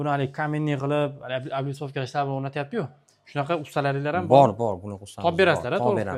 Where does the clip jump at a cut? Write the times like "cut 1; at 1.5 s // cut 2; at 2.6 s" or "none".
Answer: none